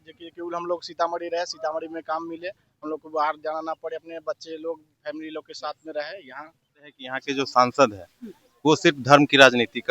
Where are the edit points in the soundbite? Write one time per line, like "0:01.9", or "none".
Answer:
0:07.1